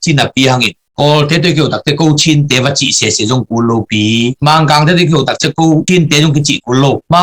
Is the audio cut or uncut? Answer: uncut